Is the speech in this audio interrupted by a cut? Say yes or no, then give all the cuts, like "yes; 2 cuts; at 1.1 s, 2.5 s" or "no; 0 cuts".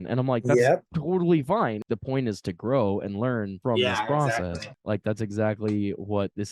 yes; 2 cuts; at 1.8 s, 4.7 s